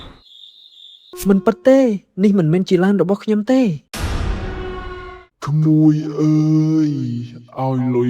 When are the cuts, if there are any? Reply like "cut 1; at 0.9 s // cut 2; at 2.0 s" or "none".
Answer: cut 1; at 1.1 s // cut 2; at 5.1 s